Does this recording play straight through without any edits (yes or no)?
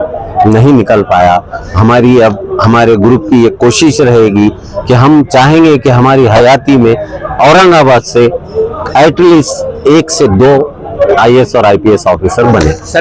yes